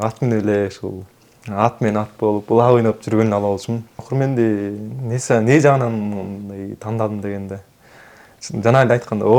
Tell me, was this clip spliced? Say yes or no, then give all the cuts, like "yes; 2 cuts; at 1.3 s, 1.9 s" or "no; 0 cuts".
yes; 1 cut; at 4.0 s